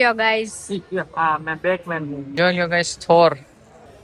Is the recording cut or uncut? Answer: cut